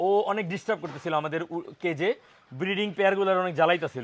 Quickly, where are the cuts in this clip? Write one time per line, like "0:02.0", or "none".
none